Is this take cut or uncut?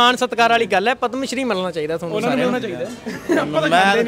uncut